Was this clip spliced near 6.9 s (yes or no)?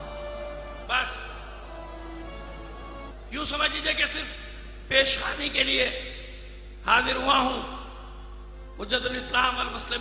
no